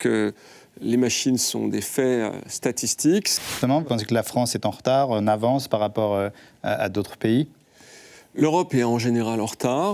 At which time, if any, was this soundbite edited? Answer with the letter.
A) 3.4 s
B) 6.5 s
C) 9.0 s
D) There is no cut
A